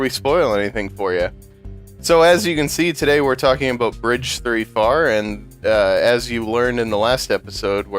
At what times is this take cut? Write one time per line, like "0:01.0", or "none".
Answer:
0:06.1